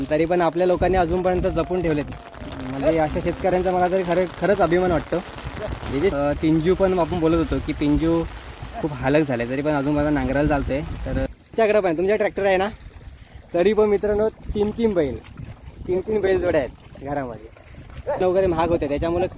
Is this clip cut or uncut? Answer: cut